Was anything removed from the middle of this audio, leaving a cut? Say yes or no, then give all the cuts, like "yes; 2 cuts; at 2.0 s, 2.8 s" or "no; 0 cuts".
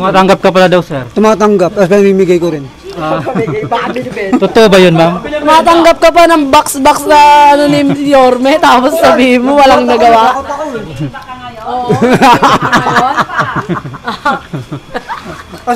no; 0 cuts